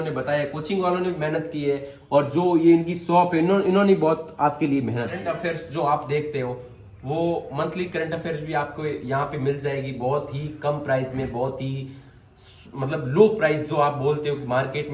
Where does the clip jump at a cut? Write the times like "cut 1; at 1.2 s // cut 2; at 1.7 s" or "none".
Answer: cut 1; at 5.2 s